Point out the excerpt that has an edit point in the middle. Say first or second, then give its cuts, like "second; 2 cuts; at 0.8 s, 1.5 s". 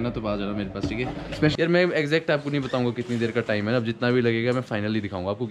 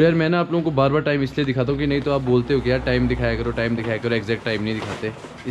first; 1 cut; at 1.5 s